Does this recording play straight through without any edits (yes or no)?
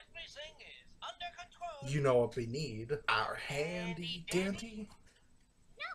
no